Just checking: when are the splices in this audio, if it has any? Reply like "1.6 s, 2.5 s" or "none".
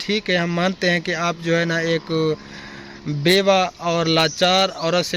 none